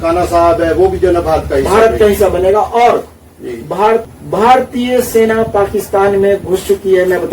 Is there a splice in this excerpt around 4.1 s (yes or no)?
yes